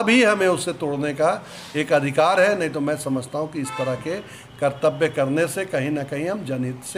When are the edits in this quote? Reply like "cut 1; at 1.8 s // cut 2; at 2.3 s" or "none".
none